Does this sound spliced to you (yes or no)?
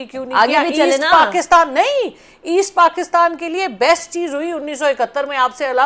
no